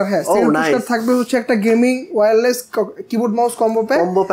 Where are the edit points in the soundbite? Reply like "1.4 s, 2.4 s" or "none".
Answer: none

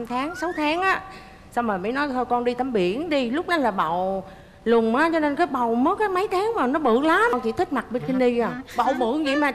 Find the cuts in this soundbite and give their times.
7.4 s

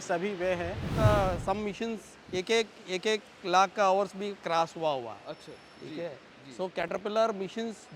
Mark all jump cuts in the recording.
0.9 s

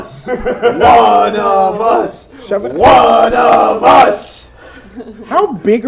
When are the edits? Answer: none

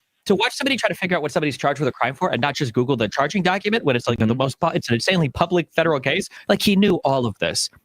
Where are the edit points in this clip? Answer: 6.3 s

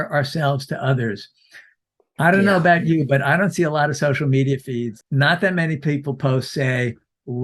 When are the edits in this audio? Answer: 5.0 s

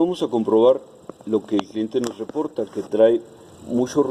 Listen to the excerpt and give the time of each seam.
none

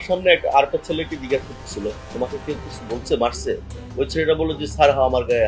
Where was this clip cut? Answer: 2.1 s

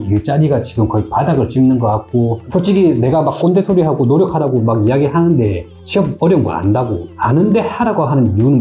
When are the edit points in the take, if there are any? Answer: 2.4 s

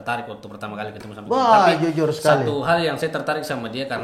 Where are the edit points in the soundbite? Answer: none

